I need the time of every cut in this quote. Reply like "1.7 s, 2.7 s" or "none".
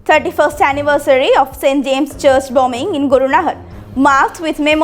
none